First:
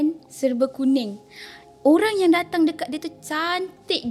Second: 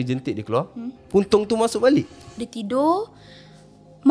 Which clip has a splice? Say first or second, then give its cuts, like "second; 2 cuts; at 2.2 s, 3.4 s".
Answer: second; 1 cut; at 2.2 s